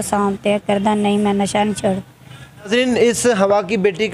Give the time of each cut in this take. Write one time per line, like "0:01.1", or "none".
0:02.7